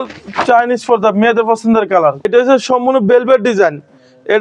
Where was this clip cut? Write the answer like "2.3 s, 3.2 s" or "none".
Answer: 2.2 s